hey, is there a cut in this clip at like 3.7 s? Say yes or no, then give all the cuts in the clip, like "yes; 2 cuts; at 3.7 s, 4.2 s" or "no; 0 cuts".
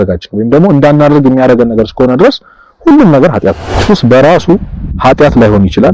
yes; 1 cut; at 3.7 s